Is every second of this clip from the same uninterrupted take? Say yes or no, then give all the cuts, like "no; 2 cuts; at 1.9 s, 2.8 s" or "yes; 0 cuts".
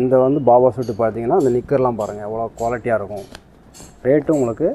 yes; 0 cuts